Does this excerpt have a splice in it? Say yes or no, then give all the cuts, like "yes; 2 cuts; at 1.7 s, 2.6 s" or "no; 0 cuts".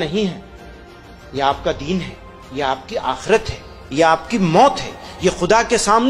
no; 0 cuts